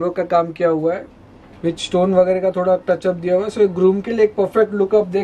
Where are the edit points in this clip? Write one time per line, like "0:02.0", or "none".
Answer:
none